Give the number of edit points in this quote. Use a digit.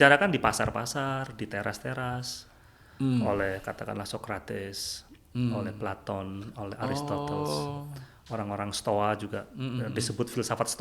0